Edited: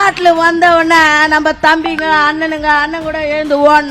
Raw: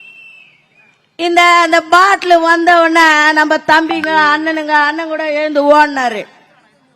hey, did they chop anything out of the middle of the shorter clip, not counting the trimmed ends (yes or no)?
no